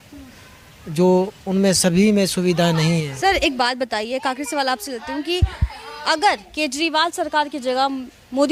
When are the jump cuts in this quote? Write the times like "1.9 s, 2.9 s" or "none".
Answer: none